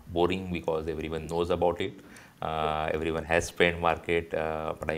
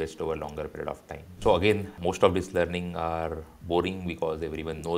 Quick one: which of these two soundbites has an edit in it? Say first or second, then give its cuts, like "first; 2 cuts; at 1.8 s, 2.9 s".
second; 2 cuts; at 1.4 s, 2.0 s